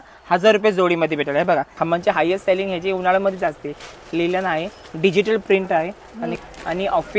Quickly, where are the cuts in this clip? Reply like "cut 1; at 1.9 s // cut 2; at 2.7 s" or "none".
cut 1; at 1.7 s // cut 2; at 6.4 s